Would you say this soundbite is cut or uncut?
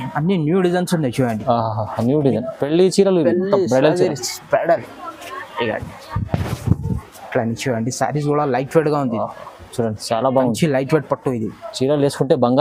uncut